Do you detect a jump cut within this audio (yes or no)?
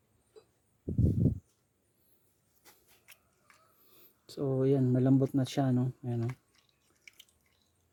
no